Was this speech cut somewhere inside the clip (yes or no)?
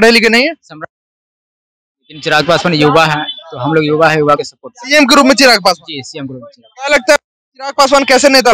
no